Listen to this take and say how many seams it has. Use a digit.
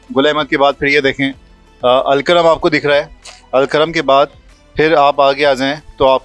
0